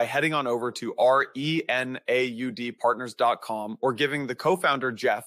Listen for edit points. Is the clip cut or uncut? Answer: uncut